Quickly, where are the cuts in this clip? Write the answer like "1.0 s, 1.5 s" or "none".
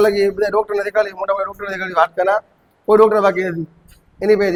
none